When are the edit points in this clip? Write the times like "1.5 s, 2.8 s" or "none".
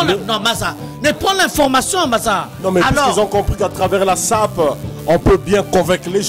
2.5 s